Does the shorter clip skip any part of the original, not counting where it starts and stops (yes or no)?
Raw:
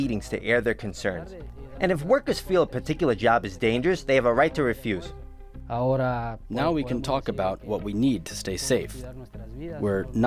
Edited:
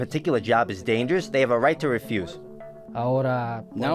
no